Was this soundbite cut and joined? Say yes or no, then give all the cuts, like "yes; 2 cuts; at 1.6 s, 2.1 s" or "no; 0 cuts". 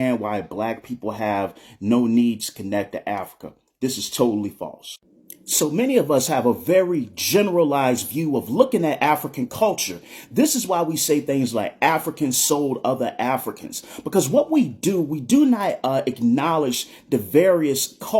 no; 0 cuts